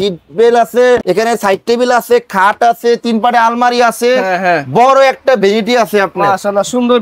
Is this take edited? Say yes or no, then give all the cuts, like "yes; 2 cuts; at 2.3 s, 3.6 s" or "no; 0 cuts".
no; 0 cuts